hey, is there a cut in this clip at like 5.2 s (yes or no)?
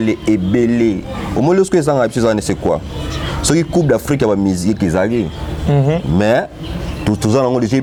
no